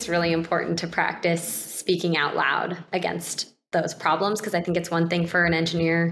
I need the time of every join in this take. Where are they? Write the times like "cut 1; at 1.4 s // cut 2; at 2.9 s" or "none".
none